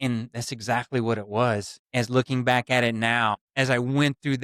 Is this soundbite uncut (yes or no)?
no